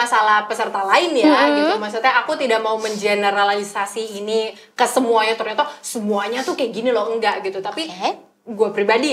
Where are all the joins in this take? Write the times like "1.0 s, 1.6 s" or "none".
none